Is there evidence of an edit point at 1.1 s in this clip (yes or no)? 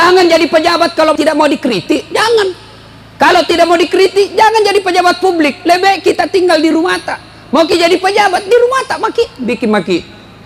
yes